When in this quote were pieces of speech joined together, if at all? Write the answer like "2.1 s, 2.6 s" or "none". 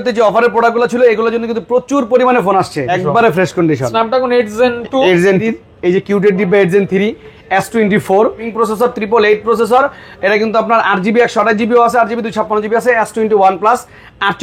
2.9 s, 5.4 s, 8.5 s